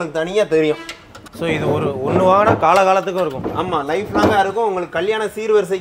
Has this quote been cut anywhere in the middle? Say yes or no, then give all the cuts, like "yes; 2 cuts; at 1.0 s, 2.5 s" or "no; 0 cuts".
no; 0 cuts